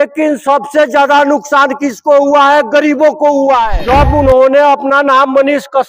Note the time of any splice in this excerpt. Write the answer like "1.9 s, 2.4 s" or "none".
3.7 s